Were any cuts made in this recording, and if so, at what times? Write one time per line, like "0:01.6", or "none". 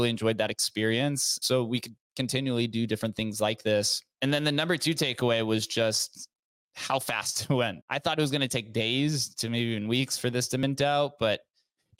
0:01.4
0:04.1
0:07.8